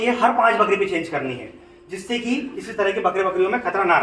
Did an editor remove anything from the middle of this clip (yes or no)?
no